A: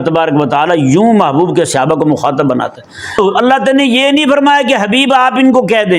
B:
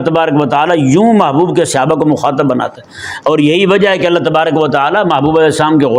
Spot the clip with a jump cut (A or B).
A